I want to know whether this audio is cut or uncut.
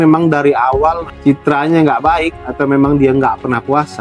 cut